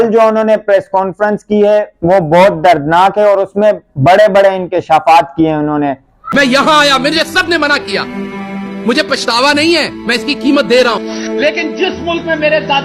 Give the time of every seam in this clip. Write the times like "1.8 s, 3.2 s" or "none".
6.2 s